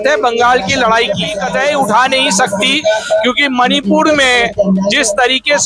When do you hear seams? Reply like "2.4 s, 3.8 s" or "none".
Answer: 1.3 s